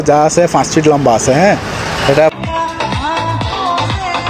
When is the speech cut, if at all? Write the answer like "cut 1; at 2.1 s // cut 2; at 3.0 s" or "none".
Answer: cut 1; at 2.3 s